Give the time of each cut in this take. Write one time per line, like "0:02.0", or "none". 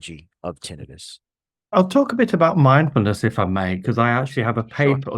0:01.7